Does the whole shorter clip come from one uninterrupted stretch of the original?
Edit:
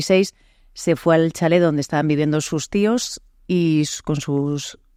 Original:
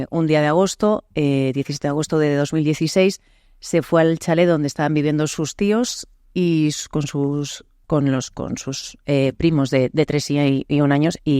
yes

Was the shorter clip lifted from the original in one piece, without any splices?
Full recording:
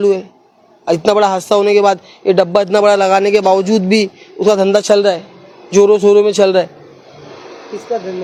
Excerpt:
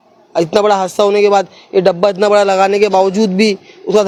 yes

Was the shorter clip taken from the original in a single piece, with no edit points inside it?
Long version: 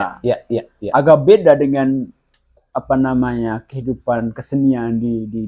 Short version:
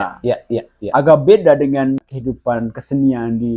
no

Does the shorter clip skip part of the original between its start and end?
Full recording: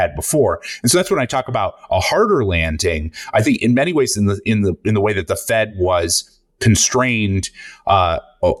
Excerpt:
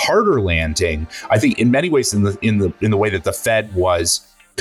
no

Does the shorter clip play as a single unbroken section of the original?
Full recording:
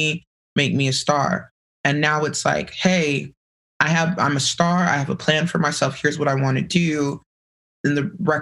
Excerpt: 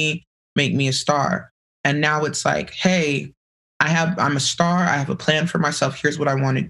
yes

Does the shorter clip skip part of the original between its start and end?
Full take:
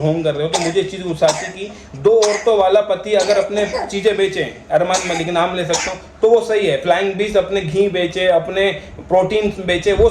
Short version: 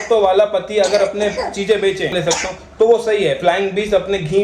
yes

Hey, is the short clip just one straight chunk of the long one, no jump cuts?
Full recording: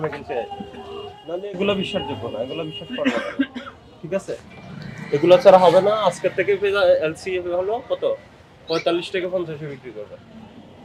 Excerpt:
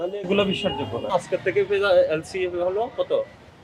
no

